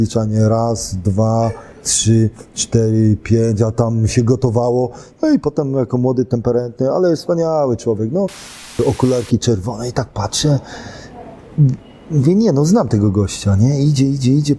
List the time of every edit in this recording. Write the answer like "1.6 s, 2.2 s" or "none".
8.8 s